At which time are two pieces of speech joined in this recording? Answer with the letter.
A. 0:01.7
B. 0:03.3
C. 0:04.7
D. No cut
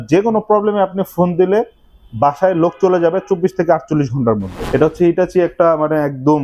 C